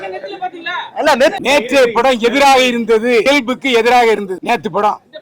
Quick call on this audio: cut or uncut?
cut